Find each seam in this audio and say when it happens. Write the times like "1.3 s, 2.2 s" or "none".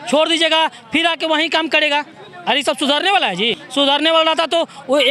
3.6 s